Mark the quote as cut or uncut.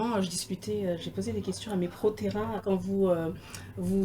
cut